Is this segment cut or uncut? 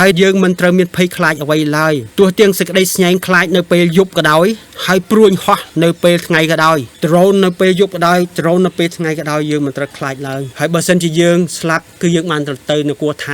cut